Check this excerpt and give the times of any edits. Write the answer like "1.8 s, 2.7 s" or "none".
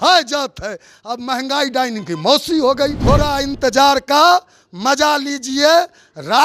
3.0 s